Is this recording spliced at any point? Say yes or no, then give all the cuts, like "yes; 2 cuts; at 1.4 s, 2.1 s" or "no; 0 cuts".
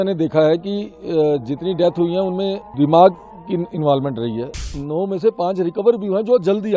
yes; 2 cuts; at 2.7 s, 4.7 s